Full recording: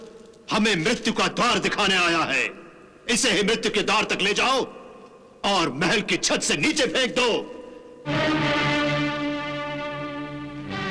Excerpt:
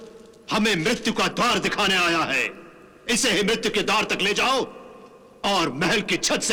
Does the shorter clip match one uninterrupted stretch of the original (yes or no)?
yes